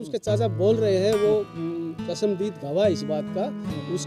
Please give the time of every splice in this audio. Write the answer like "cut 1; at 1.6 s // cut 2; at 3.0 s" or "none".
none